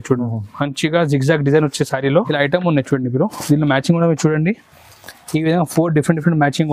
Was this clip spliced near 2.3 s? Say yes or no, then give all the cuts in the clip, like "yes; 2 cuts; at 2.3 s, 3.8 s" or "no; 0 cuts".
yes; 1 cut; at 2.3 s